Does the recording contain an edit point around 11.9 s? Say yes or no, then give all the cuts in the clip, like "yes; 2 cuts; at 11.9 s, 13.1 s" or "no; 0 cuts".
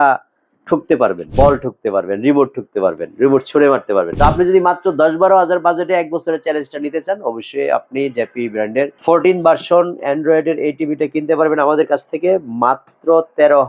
no; 2 cuts; at 1.3 s, 4.1 s